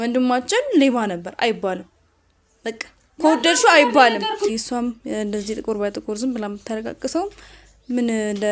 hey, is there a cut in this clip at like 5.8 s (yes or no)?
no